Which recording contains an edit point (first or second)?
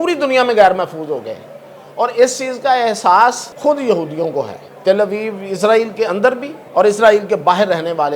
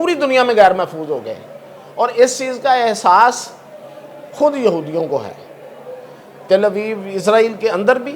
first